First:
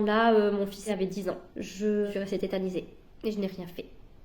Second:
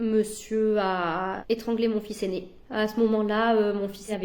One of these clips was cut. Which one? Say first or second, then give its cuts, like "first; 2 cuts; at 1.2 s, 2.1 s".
first; 1 cut; at 2.1 s